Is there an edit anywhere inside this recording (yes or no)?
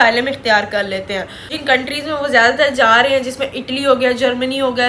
yes